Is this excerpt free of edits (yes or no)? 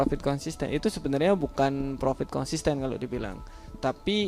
yes